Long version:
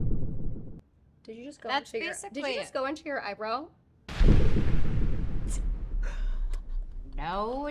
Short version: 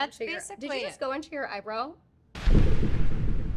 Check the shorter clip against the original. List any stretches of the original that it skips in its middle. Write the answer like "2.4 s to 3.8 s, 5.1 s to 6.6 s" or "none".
none